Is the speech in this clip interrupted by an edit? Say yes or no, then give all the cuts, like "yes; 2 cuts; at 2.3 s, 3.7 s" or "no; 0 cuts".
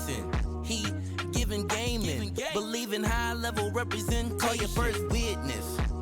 no; 0 cuts